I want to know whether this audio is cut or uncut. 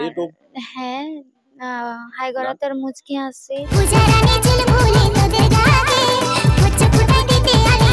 cut